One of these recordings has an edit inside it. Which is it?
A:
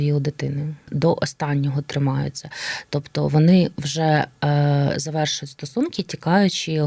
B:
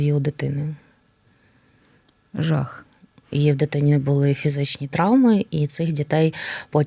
A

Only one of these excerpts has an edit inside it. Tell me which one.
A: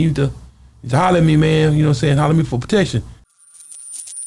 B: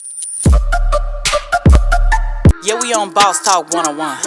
A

